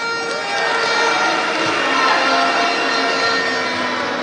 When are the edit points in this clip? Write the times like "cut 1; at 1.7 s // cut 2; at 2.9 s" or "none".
none